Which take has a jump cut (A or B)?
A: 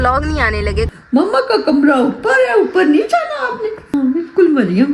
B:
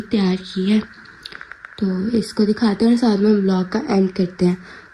A